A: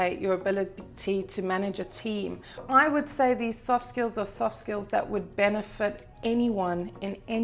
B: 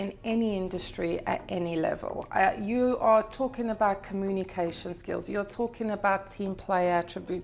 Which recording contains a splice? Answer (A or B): A